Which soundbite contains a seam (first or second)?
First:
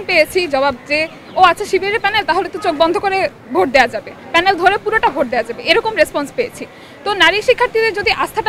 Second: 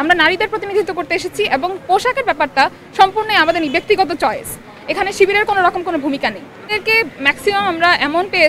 second